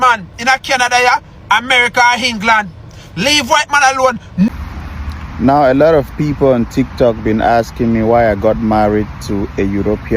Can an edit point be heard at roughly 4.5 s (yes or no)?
yes